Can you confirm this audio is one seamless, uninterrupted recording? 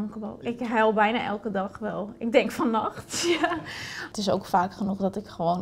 no; 1 cut; at 4.0 s

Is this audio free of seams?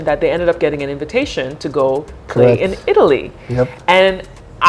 yes; 0 cuts

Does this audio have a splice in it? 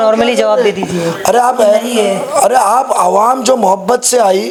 no; 0 cuts

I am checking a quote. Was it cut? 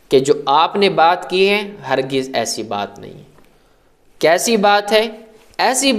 no; 0 cuts

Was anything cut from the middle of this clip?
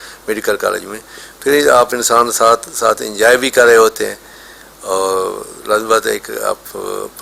no; 0 cuts

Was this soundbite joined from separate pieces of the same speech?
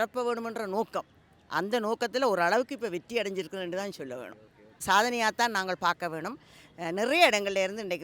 yes; 1 cut; at 4.8 s

